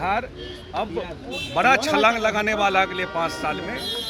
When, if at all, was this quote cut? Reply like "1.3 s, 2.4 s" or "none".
none